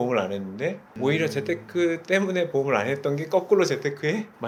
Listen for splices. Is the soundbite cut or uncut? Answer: uncut